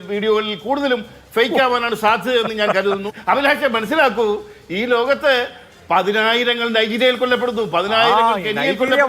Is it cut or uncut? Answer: cut